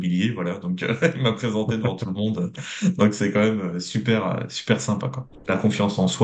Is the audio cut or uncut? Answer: cut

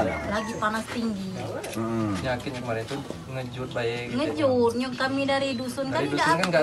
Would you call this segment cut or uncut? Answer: uncut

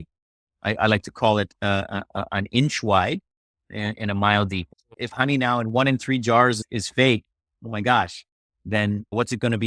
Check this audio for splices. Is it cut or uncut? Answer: cut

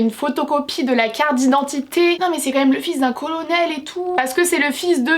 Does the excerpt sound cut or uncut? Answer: cut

